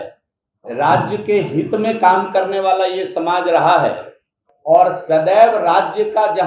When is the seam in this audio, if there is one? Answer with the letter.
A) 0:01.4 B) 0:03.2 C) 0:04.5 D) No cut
D